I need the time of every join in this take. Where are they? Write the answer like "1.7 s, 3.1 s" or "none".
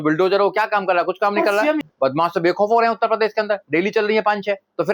1.8 s